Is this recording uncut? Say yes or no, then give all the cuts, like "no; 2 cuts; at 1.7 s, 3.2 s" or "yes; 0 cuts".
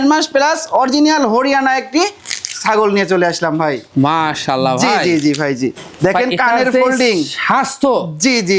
yes; 0 cuts